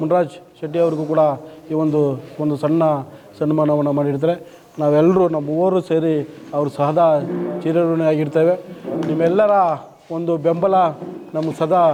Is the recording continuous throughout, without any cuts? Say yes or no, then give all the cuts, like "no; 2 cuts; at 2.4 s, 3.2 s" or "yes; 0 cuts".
yes; 0 cuts